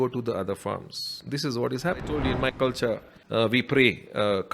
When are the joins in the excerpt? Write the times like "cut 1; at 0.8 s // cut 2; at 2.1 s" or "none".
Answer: cut 1; at 2.2 s // cut 2; at 3.1 s